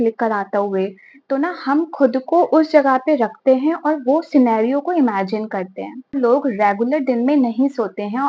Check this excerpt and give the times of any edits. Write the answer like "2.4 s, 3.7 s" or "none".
6.1 s

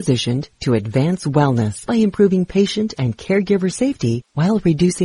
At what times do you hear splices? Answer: 1.8 s

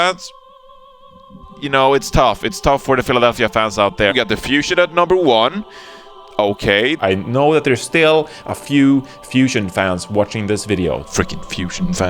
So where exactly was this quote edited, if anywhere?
4.1 s, 7.0 s

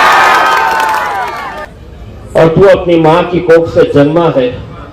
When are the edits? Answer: 1.7 s

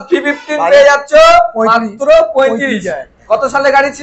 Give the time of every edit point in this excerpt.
none

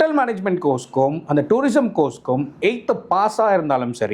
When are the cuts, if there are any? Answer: none

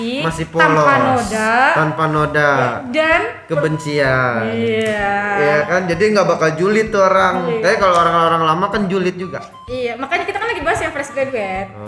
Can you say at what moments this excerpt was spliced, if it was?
none

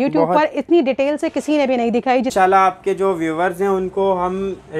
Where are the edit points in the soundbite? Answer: 2.3 s

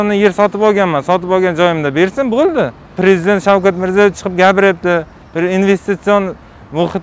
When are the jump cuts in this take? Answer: 3.0 s

